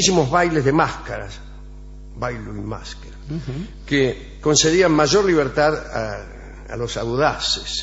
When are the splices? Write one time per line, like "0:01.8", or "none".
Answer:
0:05.9